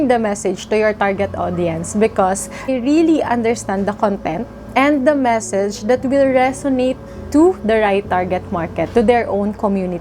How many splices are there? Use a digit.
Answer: 1